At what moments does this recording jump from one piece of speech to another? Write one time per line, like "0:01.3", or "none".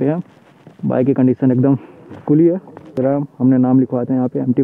0:03.0

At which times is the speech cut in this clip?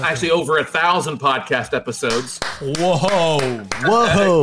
none

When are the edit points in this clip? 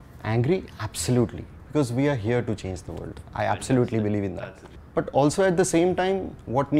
0:04.7

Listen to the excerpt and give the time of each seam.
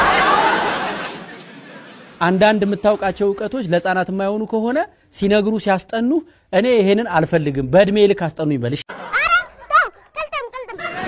0:08.8

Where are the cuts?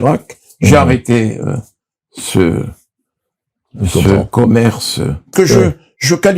0:05.3

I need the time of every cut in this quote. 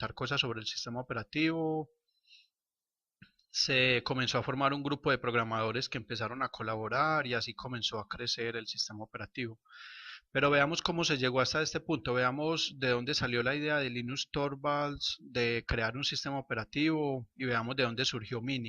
none

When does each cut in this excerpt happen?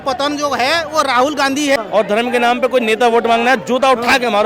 0:01.8

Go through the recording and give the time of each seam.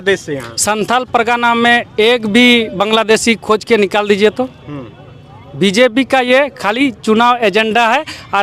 none

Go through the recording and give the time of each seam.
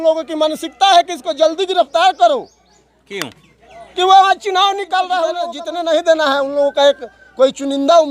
0:05.4

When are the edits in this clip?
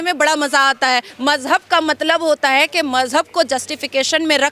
0:01.1

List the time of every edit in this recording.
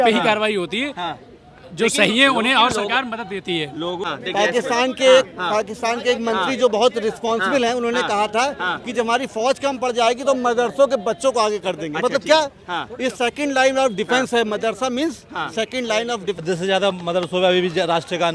0:04.0
0:16.4

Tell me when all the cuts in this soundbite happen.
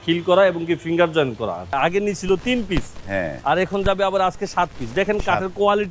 0:01.7

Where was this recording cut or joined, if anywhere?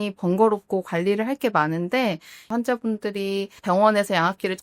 0:02.5

